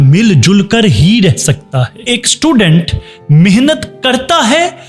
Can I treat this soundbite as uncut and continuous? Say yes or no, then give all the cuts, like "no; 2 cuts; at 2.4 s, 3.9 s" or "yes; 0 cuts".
no; 1 cut; at 2.2 s